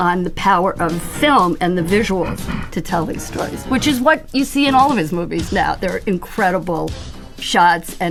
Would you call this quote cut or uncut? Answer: uncut